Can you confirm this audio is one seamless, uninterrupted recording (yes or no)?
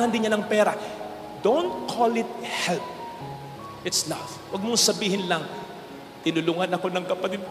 yes